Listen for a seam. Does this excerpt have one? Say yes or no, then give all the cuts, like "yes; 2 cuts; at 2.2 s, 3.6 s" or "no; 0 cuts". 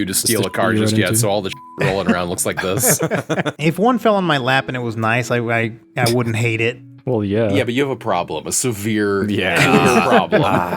yes; 2 cuts; at 3.5 s, 5.8 s